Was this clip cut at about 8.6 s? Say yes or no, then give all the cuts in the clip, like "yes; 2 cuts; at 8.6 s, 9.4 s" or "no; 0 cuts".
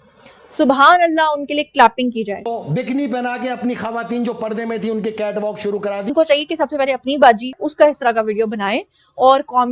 no; 2 cuts; at 2.5 s, 6.1 s